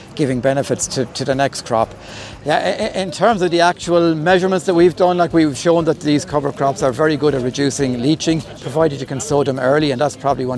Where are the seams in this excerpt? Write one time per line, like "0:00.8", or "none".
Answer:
none